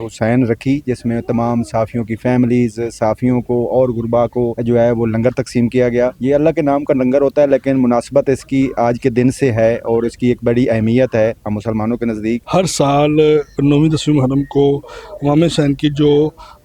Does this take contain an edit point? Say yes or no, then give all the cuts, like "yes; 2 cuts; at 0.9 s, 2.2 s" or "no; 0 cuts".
yes; 1 cut; at 12.4 s